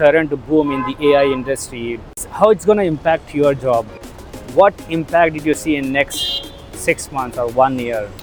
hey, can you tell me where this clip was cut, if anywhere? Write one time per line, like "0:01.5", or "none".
none